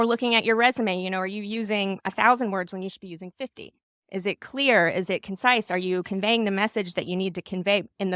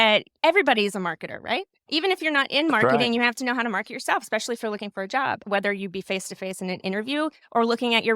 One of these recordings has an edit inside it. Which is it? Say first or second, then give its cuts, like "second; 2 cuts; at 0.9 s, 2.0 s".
second; 2 cuts; at 1.8 s, 5.4 s